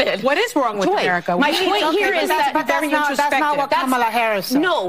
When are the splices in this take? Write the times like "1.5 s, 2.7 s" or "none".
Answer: none